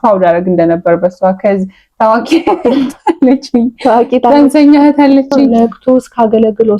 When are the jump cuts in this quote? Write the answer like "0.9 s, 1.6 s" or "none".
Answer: 5.5 s